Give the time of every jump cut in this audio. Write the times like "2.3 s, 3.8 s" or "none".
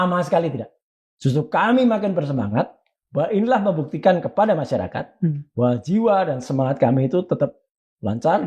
none